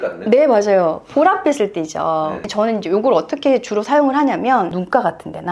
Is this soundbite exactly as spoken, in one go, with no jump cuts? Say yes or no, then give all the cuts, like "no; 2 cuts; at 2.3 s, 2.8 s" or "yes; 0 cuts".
no; 1 cut; at 2.4 s